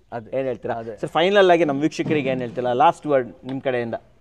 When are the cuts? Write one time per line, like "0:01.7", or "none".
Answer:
none